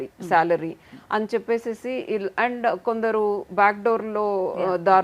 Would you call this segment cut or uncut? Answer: uncut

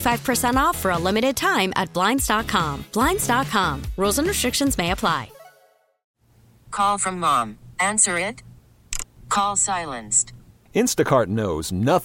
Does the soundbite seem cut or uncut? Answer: cut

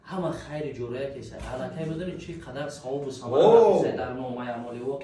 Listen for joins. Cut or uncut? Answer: uncut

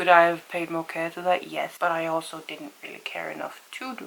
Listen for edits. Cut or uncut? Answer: uncut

